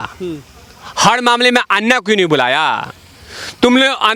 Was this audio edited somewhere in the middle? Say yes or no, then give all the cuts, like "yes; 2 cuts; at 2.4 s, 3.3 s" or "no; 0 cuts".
no; 0 cuts